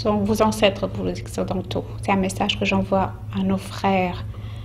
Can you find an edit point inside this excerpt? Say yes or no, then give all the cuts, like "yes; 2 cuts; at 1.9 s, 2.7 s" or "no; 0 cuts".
no; 0 cuts